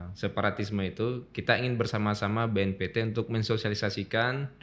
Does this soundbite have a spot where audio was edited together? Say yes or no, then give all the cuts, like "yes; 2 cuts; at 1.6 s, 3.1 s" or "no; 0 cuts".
no; 0 cuts